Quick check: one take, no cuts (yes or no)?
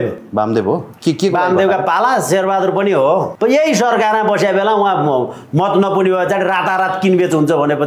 no